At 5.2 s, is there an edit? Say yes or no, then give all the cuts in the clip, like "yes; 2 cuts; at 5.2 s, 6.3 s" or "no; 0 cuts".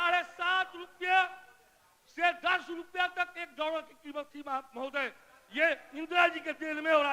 no; 0 cuts